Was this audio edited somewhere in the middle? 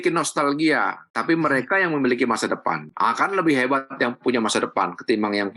no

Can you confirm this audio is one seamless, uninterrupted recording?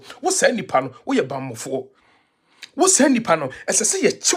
yes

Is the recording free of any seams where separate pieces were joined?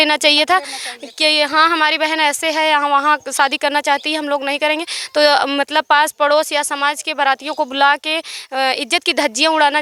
yes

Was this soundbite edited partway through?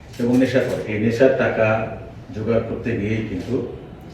yes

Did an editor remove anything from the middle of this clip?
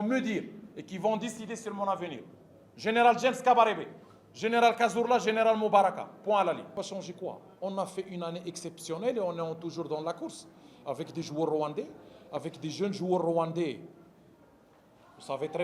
no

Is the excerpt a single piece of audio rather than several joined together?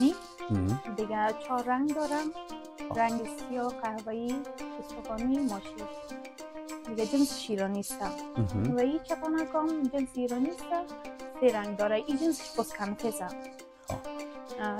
yes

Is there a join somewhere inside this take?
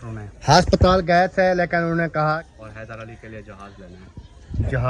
yes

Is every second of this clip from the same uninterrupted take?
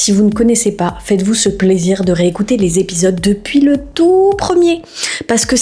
yes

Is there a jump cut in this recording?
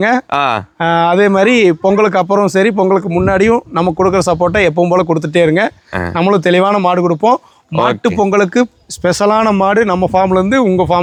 no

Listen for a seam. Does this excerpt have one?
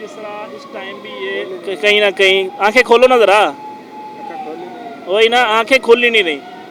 no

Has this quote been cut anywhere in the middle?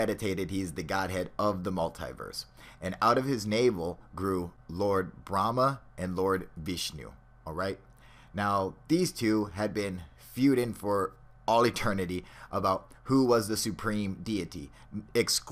yes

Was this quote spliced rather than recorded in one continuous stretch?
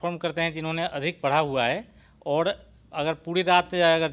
no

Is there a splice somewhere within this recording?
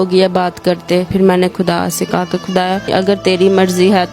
yes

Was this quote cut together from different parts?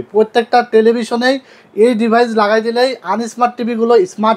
no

